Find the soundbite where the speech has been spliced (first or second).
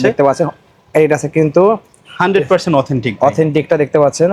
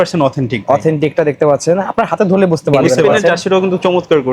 second